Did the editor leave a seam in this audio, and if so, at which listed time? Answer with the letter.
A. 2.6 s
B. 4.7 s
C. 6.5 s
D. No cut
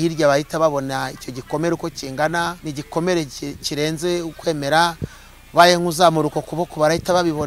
A